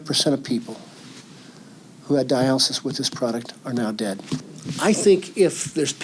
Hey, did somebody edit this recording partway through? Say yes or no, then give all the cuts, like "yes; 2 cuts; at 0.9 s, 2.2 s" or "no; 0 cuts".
no; 0 cuts